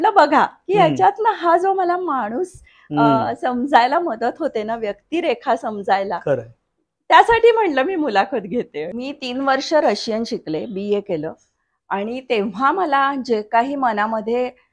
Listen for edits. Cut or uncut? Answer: cut